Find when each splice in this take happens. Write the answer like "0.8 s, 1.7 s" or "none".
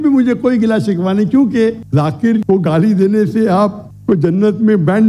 1.8 s